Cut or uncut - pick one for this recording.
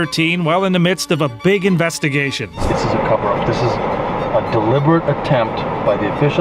cut